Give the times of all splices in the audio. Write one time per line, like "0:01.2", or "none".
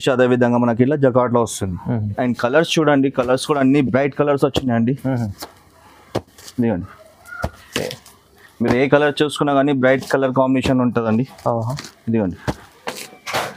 0:02.1